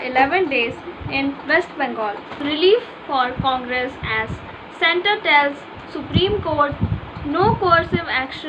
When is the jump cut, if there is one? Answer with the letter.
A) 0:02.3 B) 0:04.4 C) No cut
A